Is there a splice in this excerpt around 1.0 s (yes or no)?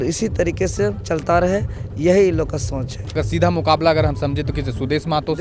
no